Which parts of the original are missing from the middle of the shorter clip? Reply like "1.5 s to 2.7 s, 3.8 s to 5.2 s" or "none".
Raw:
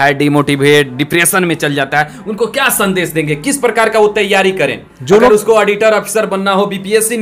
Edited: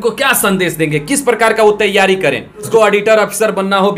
5.0 s to 5.4 s